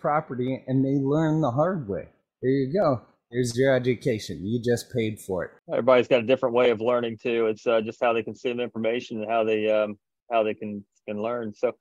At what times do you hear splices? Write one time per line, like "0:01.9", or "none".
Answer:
0:05.6